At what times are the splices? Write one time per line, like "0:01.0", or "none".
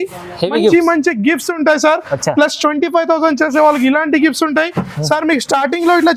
none